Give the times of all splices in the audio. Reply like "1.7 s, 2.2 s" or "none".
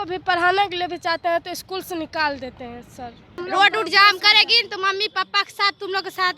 3.4 s